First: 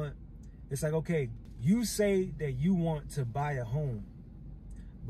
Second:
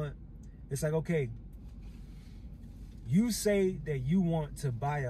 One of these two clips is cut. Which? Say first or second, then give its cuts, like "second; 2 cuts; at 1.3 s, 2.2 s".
first; 1 cut; at 1.4 s